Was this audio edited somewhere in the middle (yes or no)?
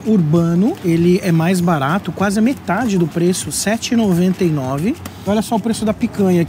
yes